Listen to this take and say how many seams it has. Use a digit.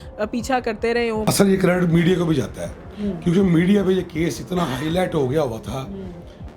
1